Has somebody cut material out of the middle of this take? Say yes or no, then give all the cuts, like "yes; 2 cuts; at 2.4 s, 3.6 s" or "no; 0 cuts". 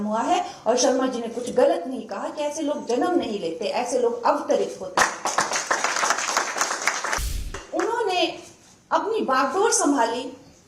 yes; 1 cut; at 7.6 s